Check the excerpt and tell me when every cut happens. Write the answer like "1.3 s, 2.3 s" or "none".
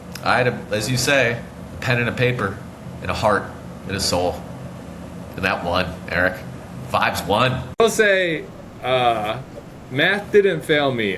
7.8 s